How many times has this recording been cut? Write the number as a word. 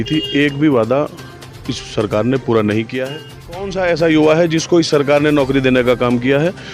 one